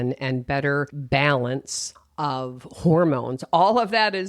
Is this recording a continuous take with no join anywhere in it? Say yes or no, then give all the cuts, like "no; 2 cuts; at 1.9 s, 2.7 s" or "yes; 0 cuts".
no; 1 cut; at 1.0 s